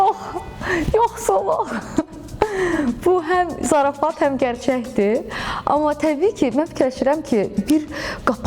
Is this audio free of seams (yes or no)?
yes